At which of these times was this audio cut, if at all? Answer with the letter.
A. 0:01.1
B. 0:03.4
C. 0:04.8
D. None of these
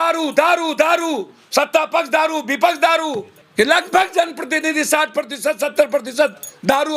B